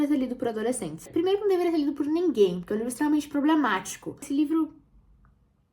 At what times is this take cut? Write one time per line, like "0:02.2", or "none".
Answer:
0:04.3